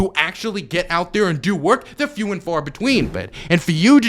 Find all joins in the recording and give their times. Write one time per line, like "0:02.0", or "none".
0:03.2